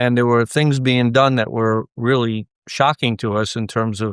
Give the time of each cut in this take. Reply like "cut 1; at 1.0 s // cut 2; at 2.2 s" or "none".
none